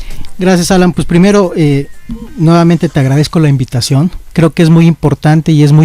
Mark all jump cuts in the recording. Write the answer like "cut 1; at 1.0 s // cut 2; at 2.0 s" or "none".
cut 1; at 1.4 s